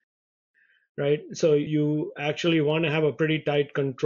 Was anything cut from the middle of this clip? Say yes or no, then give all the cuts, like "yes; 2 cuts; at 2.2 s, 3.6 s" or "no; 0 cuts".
yes; 1 cut; at 1.7 s